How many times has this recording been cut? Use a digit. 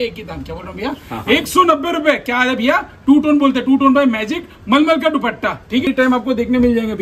1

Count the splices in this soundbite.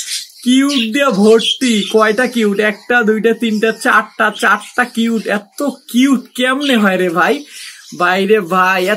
0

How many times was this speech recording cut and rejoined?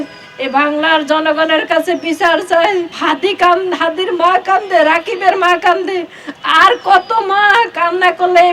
1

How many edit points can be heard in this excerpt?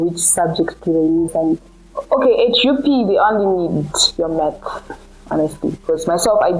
1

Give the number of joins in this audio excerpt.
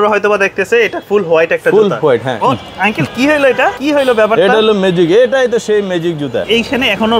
3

